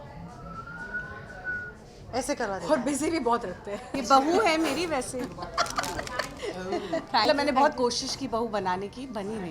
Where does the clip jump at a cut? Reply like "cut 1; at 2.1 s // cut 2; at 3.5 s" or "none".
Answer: cut 1; at 3.9 s // cut 2; at 6.3 s // cut 3; at 7.3 s